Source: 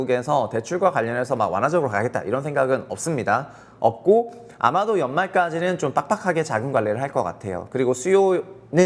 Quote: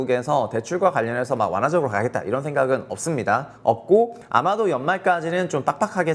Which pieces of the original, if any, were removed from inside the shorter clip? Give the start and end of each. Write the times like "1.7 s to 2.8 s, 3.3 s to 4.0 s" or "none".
3.5 s to 3.7 s, 4.4 s to 4.5 s